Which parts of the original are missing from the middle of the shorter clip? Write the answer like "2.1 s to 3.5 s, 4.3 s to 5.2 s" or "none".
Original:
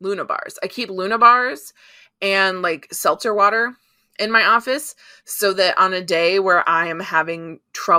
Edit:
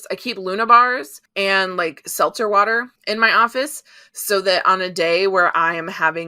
1.7 s to 2.0 s, 3.8 s to 4.1 s

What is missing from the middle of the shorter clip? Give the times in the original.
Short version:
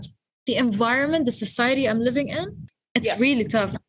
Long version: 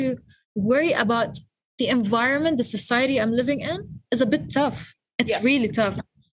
3.9 s to 4.9 s

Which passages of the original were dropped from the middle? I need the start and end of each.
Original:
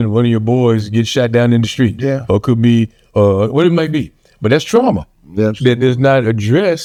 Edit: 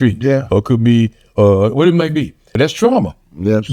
4.2 s to 4.3 s

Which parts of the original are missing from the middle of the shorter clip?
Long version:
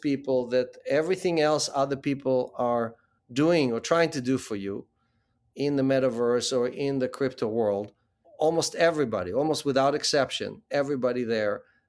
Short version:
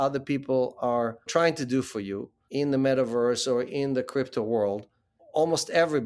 3.0 s to 3.8 s, 4.9 s to 5.4 s

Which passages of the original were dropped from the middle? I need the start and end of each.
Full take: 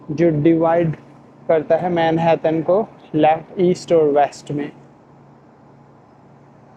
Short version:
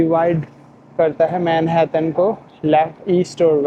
none

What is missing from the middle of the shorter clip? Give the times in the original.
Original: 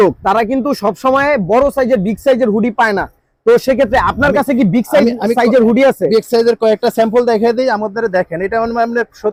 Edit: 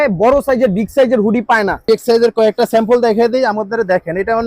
3.1 s to 6.1 s

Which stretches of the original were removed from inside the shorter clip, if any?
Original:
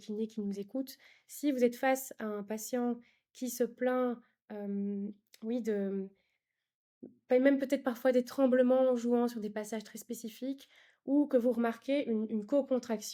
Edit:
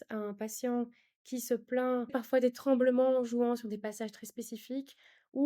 4.2 s to 7.8 s

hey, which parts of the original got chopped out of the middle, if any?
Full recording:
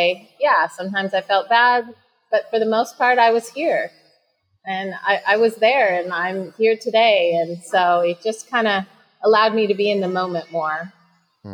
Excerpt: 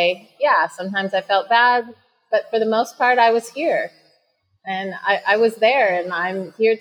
none

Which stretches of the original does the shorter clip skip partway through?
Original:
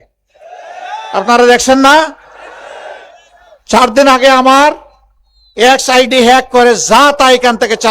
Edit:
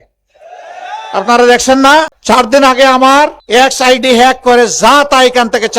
2.2 s to 3.6 s, 4.8 s to 5.5 s

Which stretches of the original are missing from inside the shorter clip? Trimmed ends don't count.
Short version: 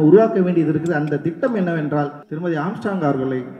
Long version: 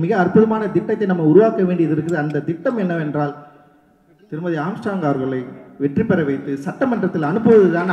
3.5 s to 4.2 s

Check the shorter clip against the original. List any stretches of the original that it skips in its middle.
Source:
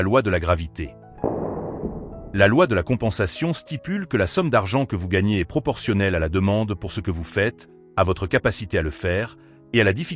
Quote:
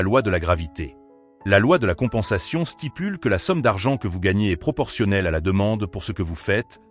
1.1 s to 1.9 s

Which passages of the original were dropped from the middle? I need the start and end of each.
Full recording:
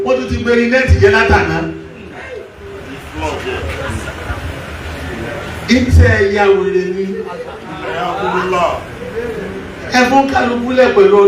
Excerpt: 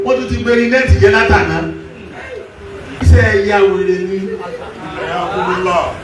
3.0 s to 5.9 s

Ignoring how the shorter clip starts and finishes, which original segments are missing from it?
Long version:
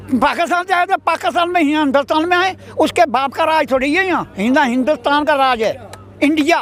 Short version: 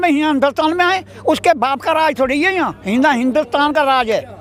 none

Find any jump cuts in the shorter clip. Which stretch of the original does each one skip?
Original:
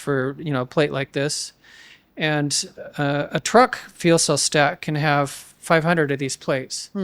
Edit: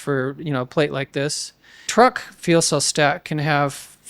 1.9 s to 3.5 s

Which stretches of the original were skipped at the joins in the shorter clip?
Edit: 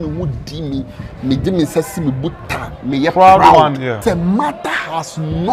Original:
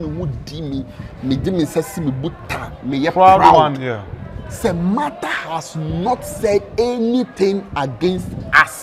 4.0 s to 4.6 s

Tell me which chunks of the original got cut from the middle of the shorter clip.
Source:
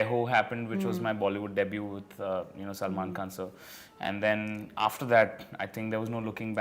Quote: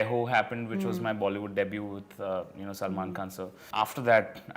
3.6 s to 4.7 s

